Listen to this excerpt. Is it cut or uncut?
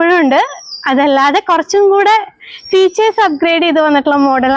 uncut